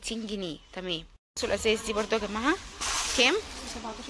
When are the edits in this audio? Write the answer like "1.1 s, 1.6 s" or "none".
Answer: 1.3 s